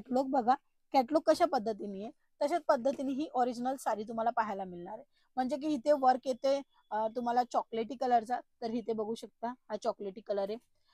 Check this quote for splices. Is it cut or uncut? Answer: uncut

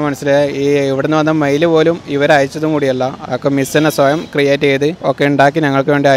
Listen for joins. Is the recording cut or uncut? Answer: cut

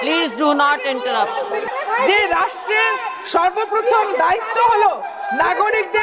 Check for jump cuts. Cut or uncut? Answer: cut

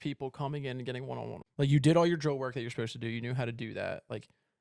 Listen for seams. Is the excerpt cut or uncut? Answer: cut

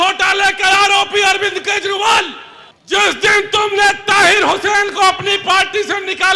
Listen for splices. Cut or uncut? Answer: cut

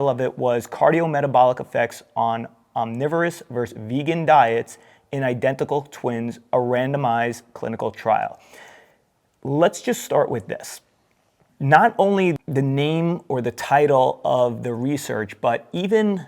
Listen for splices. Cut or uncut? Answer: cut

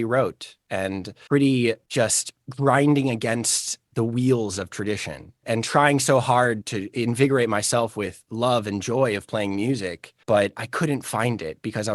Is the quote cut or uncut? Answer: uncut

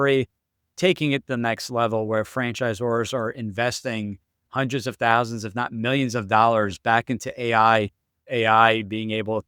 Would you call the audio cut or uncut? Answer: cut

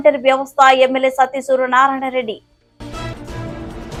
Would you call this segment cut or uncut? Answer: uncut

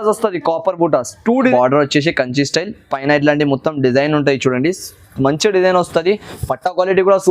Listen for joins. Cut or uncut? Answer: cut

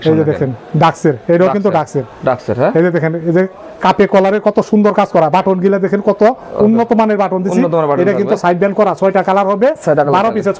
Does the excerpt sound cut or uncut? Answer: uncut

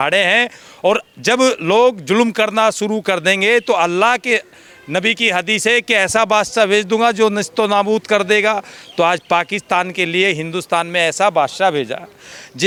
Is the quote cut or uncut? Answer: uncut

